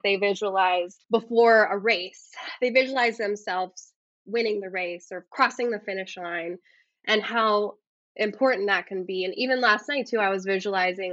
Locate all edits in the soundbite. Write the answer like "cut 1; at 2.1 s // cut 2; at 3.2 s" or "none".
cut 1; at 1.0 s